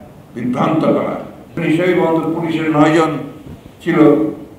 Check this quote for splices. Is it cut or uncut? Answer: cut